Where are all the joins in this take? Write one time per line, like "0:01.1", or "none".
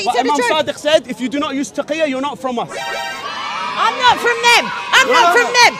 none